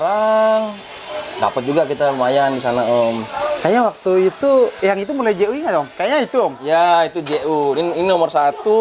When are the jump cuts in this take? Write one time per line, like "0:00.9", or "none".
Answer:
none